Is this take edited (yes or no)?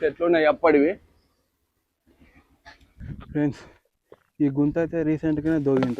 yes